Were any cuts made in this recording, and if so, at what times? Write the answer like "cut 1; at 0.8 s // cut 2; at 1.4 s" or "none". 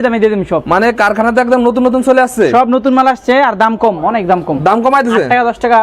none